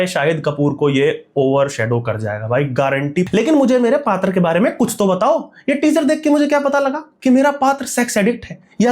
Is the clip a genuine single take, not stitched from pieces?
no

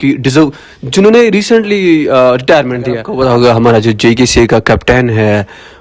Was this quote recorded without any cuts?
no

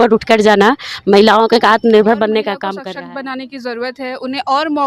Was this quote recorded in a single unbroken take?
no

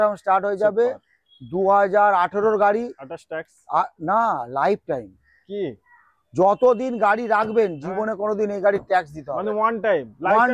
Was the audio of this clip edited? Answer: no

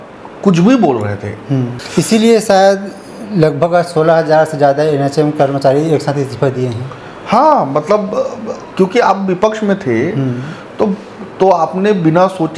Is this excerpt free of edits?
no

